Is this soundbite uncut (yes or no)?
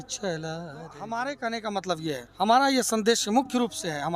no